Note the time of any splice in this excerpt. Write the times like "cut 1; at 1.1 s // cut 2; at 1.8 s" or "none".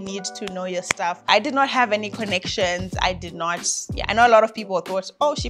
cut 1; at 1.3 s